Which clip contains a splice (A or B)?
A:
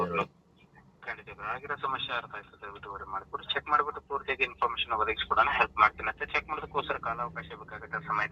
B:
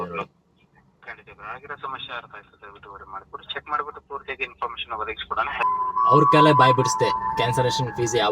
B